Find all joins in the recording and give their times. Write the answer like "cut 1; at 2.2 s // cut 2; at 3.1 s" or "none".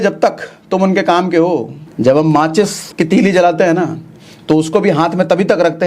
cut 1; at 1.8 s // cut 2; at 2.8 s